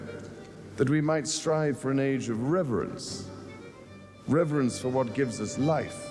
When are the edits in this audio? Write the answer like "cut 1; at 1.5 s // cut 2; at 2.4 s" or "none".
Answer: none